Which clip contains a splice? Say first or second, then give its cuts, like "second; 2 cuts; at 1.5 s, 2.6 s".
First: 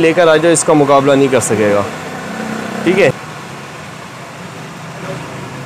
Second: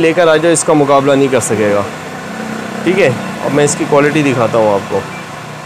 first; 1 cut; at 3.2 s